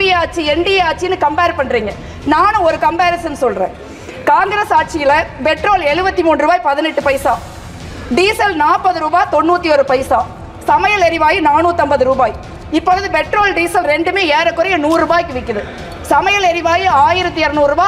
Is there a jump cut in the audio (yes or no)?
no